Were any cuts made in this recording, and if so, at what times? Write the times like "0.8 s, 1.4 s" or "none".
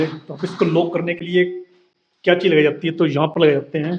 none